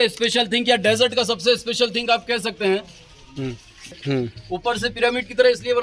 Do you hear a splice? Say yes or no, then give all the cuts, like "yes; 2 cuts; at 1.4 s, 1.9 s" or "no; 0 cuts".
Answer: yes; 1 cut; at 4.0 s